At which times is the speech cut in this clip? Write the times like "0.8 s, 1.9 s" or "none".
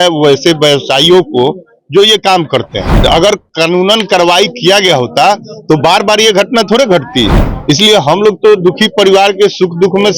2.8 s